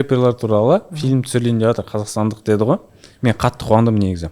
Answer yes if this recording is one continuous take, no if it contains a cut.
yes